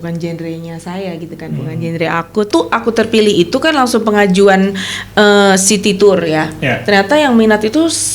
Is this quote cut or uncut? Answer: cut